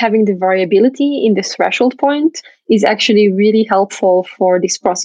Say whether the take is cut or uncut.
cut